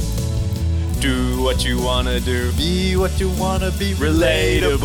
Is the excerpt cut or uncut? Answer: uncut